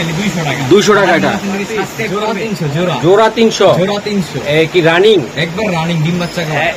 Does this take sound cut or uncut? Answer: cut